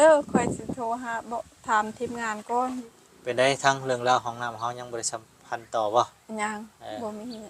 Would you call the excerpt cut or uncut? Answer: cut